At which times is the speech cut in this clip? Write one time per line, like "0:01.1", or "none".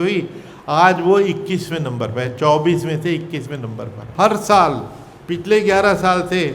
0:04.0